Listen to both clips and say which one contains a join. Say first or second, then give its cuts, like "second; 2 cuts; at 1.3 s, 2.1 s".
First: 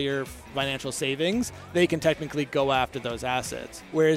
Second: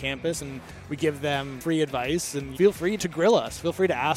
second; 2 cuts; at 1.5 s, 2.9 s